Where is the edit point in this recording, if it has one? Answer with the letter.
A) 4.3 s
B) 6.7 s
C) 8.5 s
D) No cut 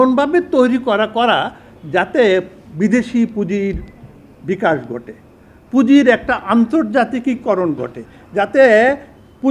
D